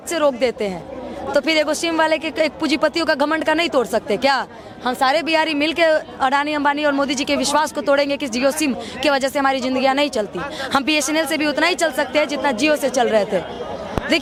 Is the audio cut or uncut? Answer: uncut